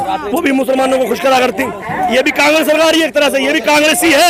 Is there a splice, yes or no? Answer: no